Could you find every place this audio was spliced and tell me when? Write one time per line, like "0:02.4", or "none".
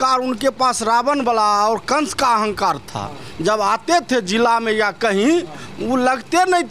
none